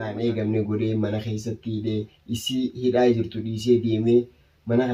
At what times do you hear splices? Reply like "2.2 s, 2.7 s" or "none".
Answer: none